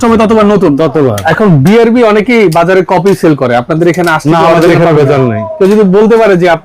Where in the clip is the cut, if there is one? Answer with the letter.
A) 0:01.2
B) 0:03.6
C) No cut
A